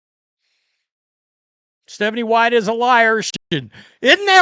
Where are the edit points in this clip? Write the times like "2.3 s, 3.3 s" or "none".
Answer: 3.3 s